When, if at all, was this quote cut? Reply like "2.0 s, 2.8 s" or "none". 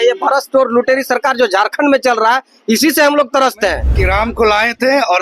3.9 s

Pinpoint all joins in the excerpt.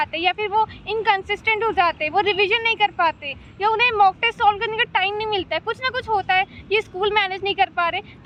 none

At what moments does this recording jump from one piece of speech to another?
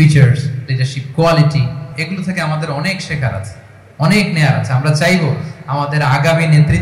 1.9 s

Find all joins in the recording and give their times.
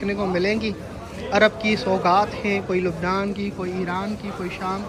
none

